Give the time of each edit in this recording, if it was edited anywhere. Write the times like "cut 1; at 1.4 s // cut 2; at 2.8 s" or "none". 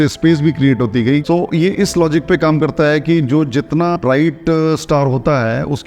cut 1; at 1.2 s